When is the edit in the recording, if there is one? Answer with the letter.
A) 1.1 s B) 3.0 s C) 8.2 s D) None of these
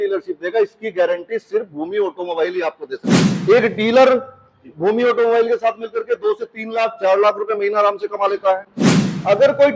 B